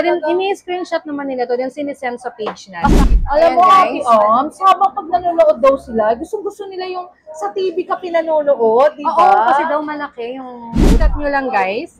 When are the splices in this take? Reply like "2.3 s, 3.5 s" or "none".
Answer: 2.9 s, 10.9 s